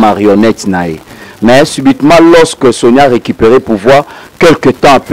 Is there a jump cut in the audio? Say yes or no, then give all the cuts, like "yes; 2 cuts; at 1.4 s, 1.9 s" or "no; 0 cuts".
no; 0 cuts